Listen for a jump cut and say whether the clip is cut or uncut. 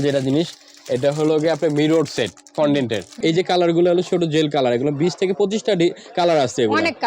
cut